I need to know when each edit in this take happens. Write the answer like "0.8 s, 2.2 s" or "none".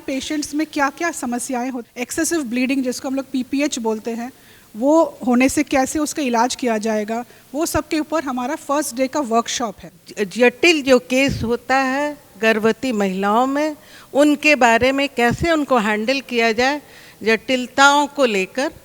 1.8 s, 9.9 s